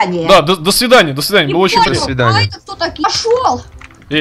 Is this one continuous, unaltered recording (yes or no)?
no